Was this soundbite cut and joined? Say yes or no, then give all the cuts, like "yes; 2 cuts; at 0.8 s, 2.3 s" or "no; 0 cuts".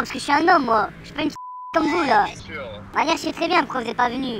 no; 0 cuts